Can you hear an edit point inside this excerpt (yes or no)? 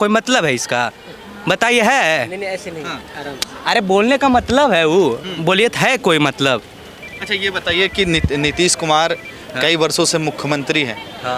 no